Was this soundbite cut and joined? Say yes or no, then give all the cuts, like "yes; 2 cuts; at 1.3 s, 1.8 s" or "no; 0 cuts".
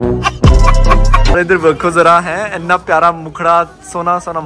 yes; 1 cut; at 1.3 s